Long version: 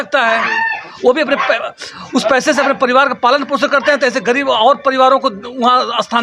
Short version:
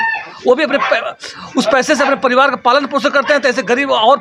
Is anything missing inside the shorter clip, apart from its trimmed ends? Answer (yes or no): no